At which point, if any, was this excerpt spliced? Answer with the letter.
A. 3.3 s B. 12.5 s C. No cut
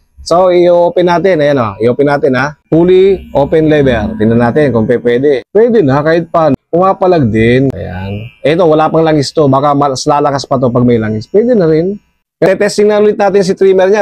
B